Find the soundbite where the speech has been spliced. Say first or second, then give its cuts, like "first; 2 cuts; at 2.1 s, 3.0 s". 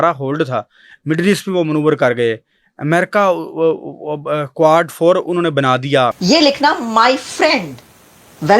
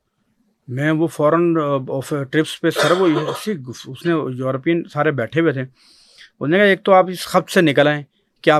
first; 1 cut; at 6.2 s